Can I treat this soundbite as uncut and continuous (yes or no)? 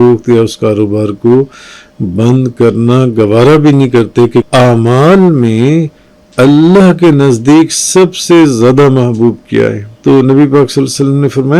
no